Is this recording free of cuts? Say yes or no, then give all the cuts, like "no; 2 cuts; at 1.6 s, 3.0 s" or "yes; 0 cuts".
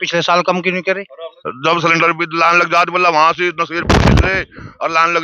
no; 1 cut; at 1.4 s